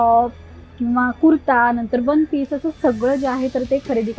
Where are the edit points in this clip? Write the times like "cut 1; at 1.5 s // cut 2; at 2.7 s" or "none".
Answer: none